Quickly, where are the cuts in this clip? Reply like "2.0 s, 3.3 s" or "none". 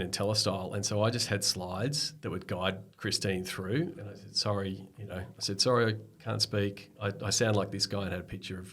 none